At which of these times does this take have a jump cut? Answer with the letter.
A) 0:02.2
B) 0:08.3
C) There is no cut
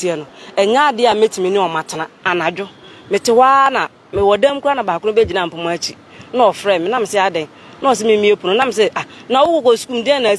A